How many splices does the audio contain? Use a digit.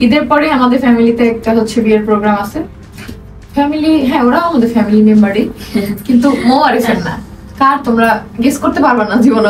0